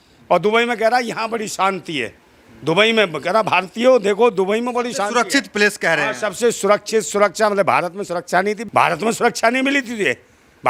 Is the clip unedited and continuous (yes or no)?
yes